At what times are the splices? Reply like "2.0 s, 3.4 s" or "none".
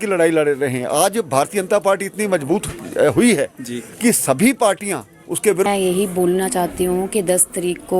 5.7 s